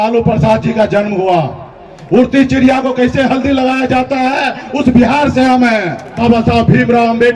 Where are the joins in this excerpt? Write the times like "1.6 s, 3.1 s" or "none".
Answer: 6.0 s